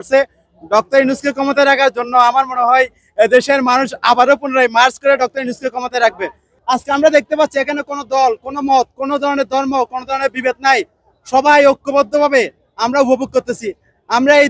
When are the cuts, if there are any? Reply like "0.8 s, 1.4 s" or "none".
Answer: 6.5 s